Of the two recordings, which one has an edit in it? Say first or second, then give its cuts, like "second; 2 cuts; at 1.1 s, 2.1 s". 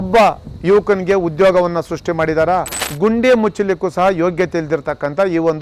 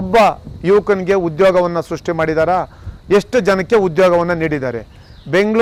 first; 1 cut; at 2.8 s